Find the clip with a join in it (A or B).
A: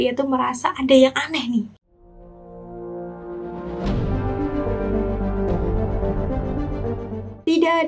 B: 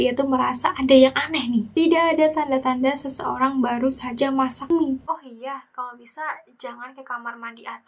B